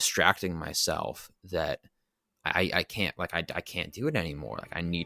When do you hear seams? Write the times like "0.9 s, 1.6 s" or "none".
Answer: none